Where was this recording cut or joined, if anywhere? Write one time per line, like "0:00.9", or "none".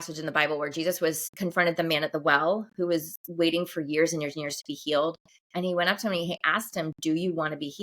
0:01.3